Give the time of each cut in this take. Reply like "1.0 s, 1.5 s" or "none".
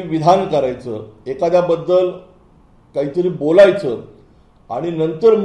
none